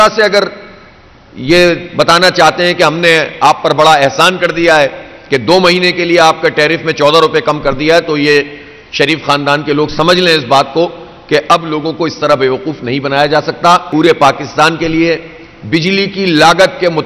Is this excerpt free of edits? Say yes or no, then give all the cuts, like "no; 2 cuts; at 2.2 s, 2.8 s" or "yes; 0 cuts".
no; 1 cut; at 13.9 s